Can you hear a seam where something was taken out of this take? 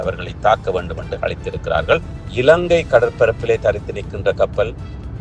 yes; 1 cut; at 2.2 s

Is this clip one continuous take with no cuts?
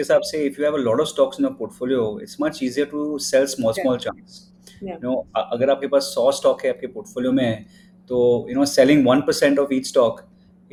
yes; 0 cuts

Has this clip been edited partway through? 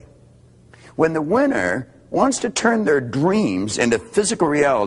yes; 1 cut; at 3.8 s

